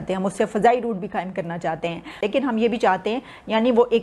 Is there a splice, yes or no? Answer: yes